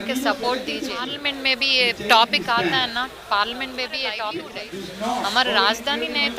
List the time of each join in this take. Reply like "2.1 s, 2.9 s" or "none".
1.2 s, 4.6 s